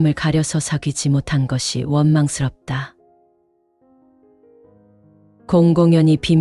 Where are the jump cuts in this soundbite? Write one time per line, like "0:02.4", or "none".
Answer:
none